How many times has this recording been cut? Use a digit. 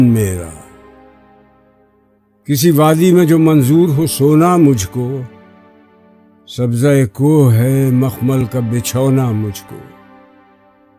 1